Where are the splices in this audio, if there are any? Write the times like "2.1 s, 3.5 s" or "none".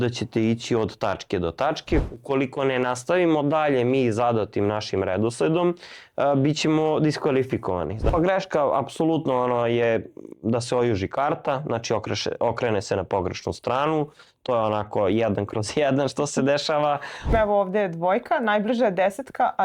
2.1 s, 8.1 s, 17.3 s